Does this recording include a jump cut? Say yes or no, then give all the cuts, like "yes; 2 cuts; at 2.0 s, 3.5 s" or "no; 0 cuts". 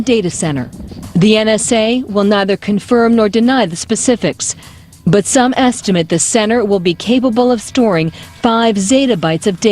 yes; 1 cut; at 6.6 s